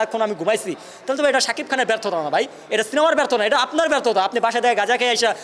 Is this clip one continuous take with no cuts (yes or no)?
yes